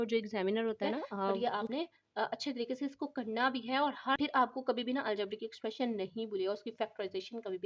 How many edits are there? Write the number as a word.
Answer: two